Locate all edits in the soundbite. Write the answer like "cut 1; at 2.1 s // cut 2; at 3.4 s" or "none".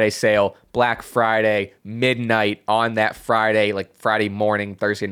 none